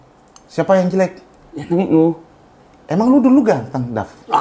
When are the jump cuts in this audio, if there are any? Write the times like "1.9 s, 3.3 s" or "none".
none